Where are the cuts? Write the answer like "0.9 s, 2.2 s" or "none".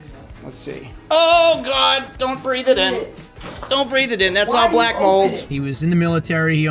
5.5 s